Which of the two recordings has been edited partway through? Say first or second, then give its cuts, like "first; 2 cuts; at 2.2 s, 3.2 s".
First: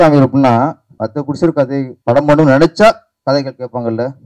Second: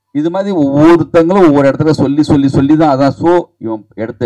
first; 2 cuts; at 0.9 s, 1.9 s